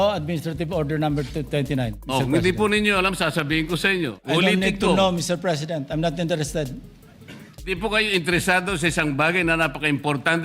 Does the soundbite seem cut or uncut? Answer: cut